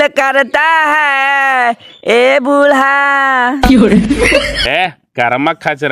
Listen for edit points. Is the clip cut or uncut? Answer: uncut